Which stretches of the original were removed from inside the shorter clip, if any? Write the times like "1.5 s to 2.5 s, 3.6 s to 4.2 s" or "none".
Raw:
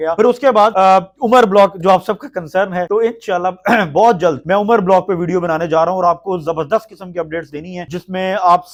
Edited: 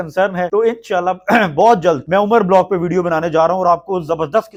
none